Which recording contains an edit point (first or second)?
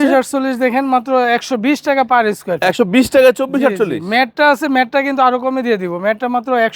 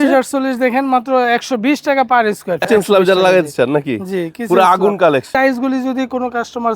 second